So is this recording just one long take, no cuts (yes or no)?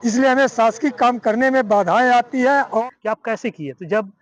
no